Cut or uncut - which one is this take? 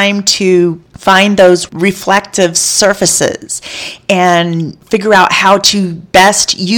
cut